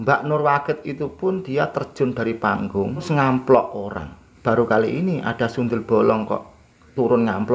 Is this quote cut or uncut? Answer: cut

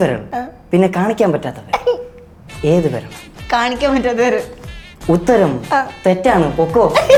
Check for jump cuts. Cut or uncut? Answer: uncut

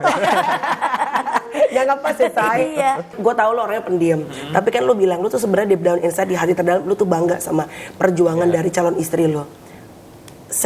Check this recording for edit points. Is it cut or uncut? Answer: cut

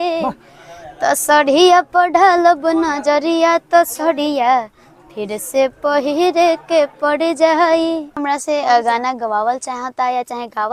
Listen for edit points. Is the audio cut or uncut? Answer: cut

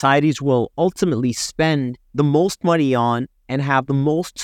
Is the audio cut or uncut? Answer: cut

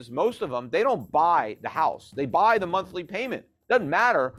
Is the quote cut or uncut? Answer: uncut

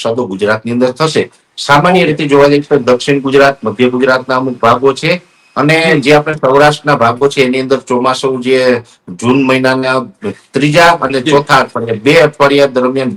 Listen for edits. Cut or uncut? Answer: uncut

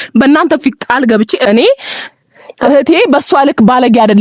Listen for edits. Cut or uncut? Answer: cut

